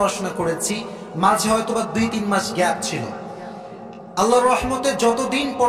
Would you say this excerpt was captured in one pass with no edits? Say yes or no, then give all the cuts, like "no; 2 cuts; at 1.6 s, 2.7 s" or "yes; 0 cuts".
yes; 0 cuts